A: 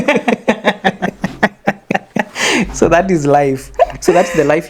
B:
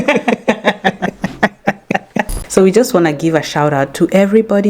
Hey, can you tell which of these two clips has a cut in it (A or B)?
B